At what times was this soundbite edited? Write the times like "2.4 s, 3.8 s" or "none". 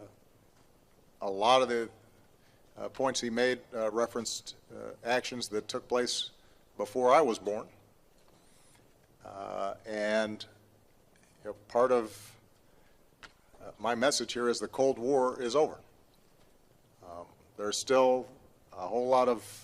15.9 s

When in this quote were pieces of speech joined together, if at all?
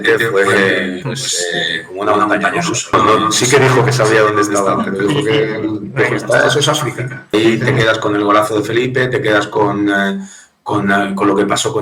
2.9 s, 7.3 s

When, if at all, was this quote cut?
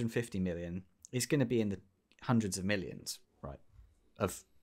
none

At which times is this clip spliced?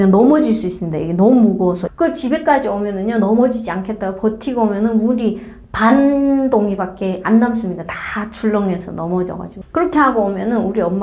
1.8 s

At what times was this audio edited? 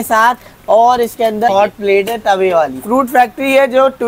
1.5 s, 2.8 s

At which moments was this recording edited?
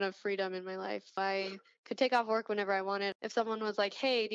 1.1 s, 3.1 s

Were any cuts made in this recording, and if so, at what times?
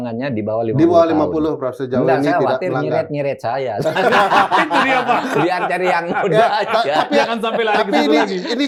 none

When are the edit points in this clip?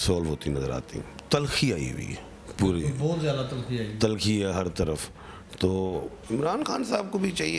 none

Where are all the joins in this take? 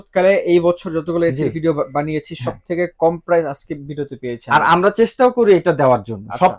none

